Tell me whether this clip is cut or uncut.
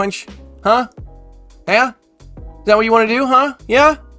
uncut